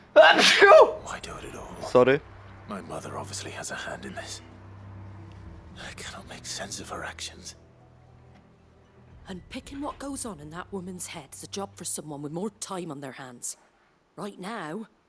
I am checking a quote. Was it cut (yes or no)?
no